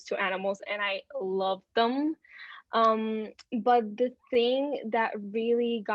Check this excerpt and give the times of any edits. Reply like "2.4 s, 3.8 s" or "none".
none